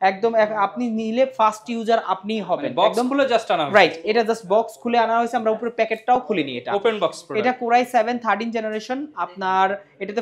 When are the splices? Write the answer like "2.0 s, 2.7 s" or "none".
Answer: none